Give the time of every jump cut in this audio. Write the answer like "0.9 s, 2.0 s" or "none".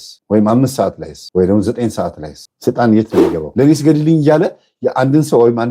3.4 s